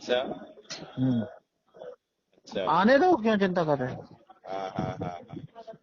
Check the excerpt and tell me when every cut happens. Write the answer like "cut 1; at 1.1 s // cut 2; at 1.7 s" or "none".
none